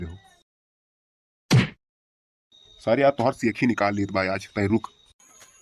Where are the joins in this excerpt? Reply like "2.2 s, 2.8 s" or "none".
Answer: none